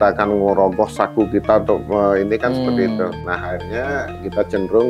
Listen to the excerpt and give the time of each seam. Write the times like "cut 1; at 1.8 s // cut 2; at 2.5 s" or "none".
cut 1; at 3.2 s